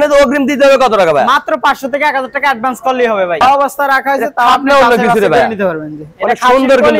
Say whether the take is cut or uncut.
cut